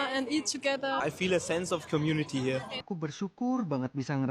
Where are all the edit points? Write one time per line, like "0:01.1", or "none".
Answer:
0:01.0
0:02.8